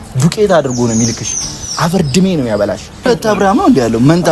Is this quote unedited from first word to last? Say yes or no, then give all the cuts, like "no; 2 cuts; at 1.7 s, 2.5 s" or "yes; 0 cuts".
no; 1 cut; at 3.1 s